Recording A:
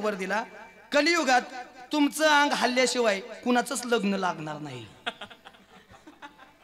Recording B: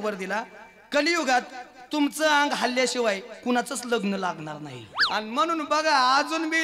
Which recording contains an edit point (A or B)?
B